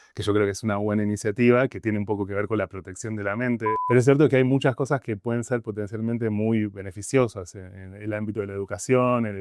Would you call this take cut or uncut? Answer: cut